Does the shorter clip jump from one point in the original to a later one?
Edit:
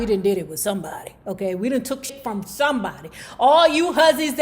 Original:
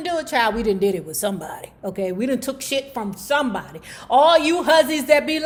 yes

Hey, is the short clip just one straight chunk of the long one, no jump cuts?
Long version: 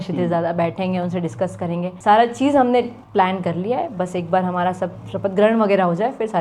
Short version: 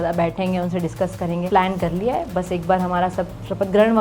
no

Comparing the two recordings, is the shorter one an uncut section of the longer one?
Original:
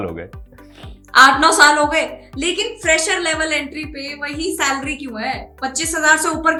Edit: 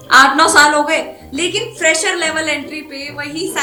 yes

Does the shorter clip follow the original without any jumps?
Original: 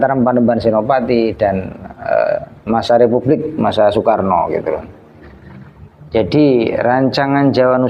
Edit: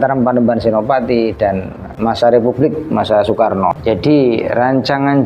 no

